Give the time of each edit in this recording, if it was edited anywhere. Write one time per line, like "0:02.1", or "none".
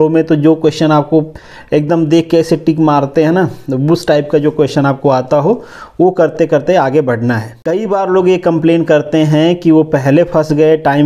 0:07.5